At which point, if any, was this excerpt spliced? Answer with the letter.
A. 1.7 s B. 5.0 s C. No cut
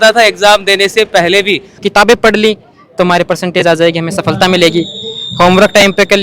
A